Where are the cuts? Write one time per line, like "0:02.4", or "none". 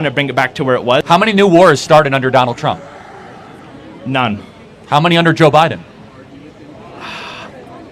0:00.9

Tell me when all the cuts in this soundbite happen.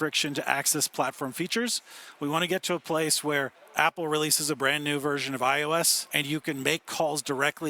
0:03.6
0:06.1

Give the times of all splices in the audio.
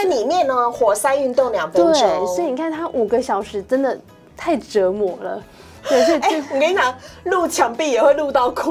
none

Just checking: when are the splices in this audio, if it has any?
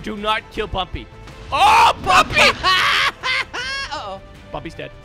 none

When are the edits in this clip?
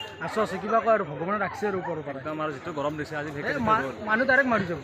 none

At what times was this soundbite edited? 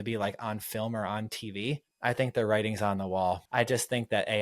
0:01.9
0:03.4

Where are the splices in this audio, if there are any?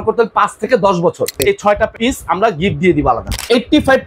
0:01.7
0:03.3

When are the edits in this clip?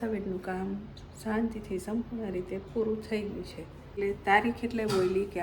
0:04.0

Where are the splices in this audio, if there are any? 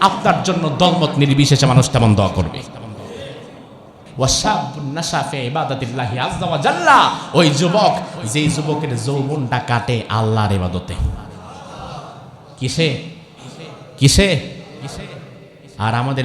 0:04.0

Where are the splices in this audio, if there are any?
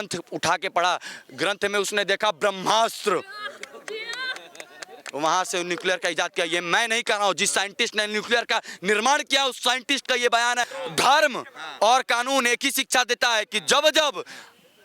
0:10.7

